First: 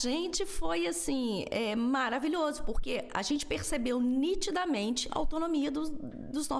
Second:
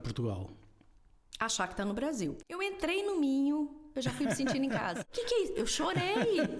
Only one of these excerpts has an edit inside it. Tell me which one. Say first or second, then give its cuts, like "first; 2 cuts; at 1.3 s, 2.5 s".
second; 2 cuts; at 2.4 s, 5.0 s